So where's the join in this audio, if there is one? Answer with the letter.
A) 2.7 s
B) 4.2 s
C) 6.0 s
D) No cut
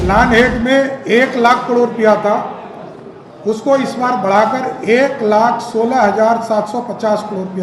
D